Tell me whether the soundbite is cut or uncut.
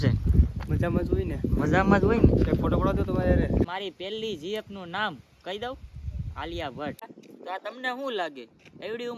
cut